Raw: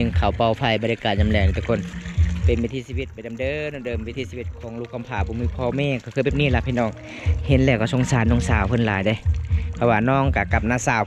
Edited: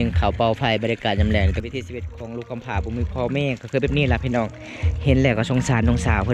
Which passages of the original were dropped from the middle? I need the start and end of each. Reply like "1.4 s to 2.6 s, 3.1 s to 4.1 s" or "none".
1.6 s to 4.0 s